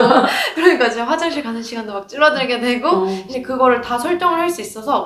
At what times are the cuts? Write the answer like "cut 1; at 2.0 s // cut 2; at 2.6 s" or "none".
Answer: cut 1; at 3.3 s